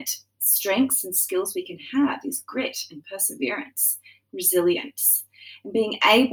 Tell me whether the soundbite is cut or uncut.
uncut